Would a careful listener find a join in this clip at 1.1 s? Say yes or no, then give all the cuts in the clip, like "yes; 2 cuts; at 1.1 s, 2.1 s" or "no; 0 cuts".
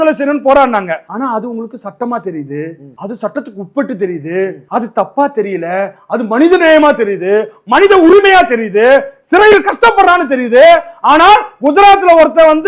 yes; 3 cuts; at 1.1 s, 2.9 s, 4.6 s